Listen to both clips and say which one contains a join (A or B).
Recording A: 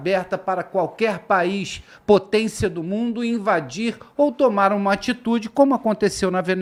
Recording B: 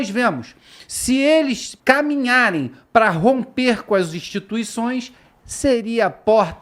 B